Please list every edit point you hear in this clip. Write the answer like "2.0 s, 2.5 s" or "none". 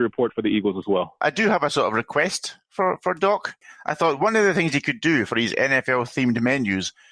1.2 s, 3.6 s